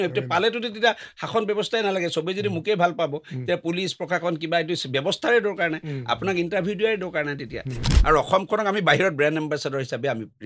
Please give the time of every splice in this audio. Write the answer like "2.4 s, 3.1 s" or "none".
7.9 s